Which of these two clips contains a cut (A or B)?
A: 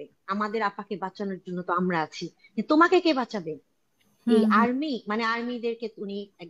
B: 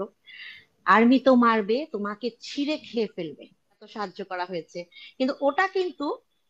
B